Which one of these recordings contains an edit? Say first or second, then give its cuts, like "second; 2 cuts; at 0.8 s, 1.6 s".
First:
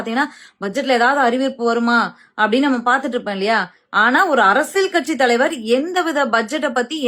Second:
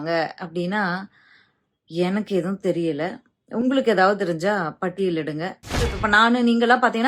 second; 1 cut; at 6.0 s